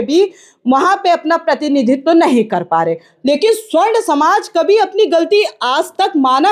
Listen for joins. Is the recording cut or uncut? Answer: uncut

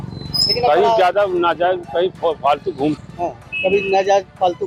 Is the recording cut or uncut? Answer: uncut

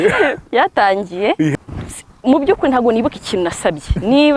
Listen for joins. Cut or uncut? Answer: cut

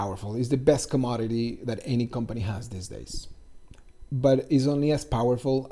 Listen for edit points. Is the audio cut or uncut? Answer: uncut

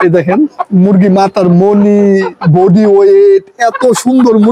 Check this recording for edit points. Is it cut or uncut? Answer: uncut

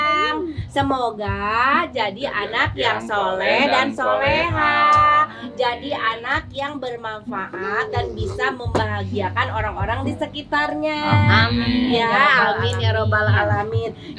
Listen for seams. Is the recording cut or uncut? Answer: uncut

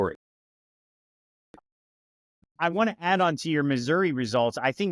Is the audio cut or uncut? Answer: cut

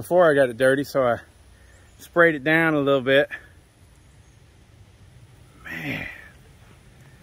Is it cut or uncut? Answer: uncut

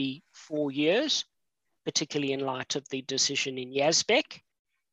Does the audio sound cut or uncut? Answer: uncut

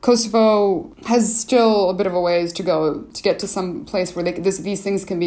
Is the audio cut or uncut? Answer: cut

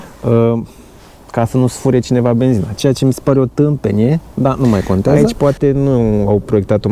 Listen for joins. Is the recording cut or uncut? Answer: cut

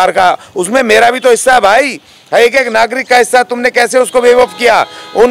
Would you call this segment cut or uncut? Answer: uncut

